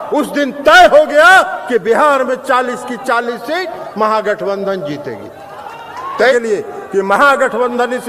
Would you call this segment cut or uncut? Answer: cut